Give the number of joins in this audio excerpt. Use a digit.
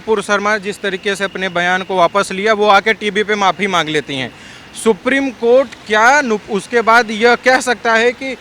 0